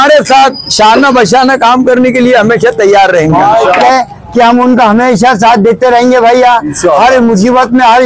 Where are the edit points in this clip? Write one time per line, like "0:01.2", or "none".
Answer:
0:03.8